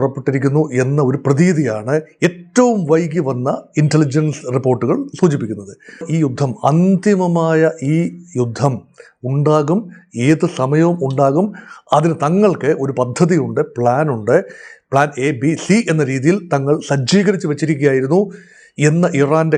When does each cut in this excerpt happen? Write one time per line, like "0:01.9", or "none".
0:06.1